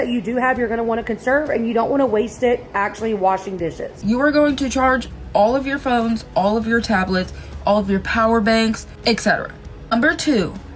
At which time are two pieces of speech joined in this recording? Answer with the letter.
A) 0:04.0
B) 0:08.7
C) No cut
A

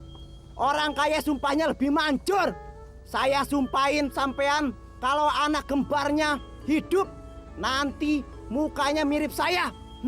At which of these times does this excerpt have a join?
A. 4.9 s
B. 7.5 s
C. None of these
A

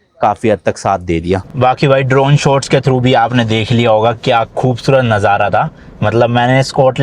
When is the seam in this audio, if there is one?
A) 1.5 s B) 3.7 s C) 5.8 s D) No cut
A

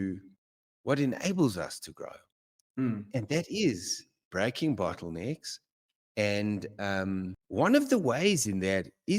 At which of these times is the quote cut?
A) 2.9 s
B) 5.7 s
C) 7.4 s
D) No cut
C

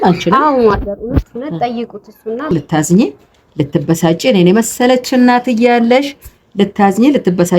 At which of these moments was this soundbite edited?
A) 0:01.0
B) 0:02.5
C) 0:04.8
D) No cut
B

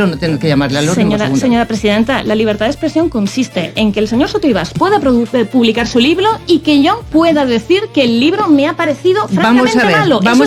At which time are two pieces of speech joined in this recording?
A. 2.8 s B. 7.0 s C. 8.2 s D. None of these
D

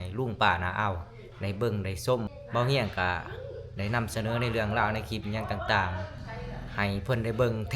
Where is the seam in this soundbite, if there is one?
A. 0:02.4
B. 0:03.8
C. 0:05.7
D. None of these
A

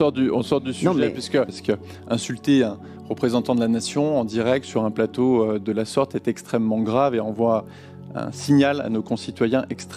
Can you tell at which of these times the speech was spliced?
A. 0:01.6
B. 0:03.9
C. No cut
A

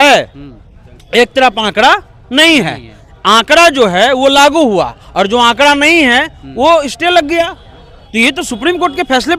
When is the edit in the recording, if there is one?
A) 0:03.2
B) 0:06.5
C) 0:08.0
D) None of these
D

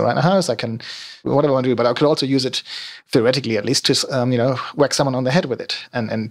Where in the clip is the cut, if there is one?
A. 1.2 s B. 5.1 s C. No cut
A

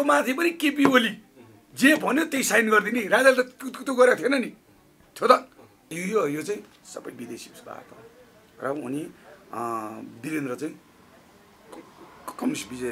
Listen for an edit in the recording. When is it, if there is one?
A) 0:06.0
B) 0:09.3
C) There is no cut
A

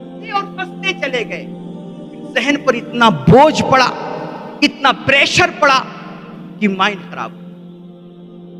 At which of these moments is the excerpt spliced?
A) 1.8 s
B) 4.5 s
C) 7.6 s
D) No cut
C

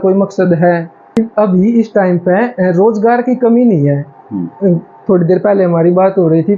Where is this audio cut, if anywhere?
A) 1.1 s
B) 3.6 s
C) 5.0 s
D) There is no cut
A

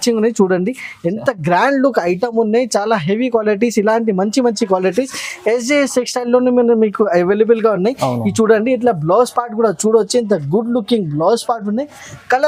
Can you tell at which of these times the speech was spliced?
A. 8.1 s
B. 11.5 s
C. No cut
C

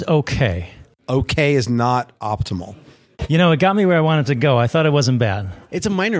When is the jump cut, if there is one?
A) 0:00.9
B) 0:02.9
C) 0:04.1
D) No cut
A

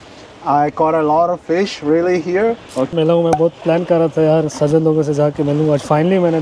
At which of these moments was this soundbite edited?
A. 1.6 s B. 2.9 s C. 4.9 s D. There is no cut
B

